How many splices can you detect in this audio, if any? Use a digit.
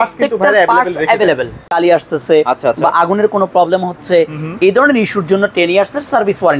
1